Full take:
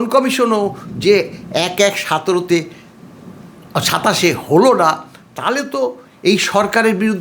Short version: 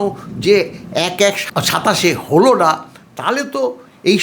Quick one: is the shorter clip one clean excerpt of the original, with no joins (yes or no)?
no